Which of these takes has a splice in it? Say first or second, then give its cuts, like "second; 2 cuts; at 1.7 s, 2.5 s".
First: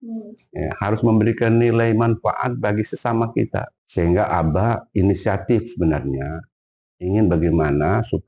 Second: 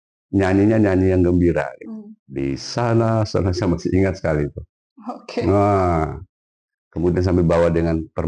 first; 1 cut; at 3.8 s